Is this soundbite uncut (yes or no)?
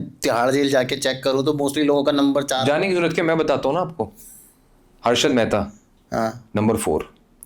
yes